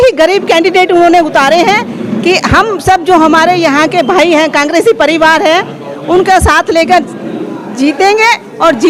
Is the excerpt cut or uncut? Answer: uncut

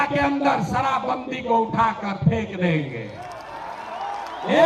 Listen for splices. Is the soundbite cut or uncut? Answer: uncut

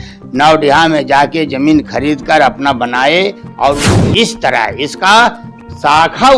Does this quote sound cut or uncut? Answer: cut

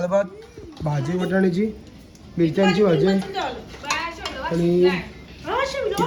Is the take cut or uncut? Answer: uncut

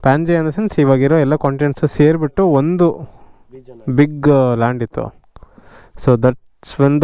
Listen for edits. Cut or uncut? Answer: uncut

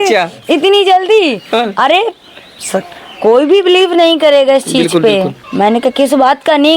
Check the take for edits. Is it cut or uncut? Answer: cut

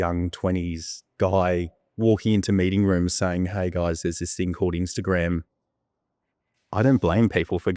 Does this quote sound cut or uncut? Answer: uncut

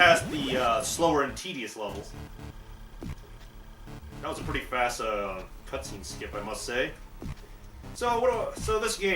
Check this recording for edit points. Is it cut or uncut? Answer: cut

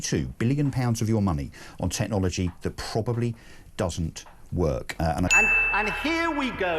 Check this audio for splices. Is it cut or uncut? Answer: cut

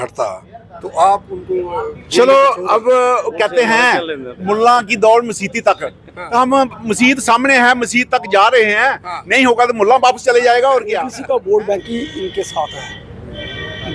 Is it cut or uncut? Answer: cut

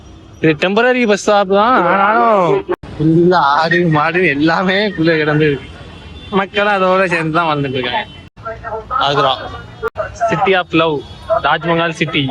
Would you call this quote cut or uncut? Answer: cut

